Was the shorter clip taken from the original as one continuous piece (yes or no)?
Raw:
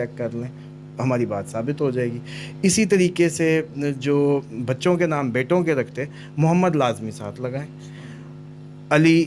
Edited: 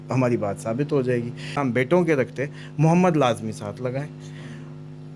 no